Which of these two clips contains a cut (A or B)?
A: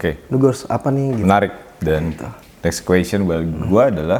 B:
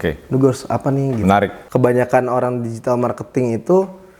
B